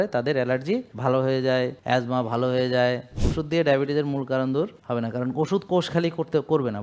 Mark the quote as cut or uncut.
cut